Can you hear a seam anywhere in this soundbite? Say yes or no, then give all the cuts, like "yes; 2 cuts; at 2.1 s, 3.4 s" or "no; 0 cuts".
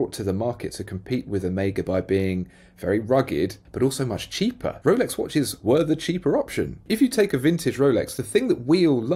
yes; 3 cuts; at 3.6 s, 4.8 s, 6.8 s